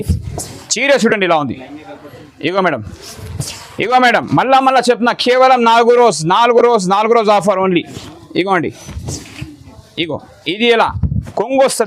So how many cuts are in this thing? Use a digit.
0